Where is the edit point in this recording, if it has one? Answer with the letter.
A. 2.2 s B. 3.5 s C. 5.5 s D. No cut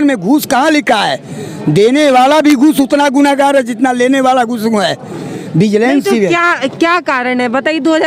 D